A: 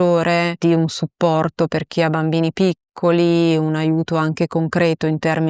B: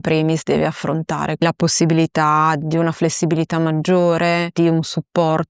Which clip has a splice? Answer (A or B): B